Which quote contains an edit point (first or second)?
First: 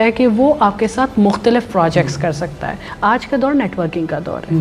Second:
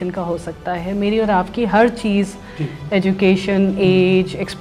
first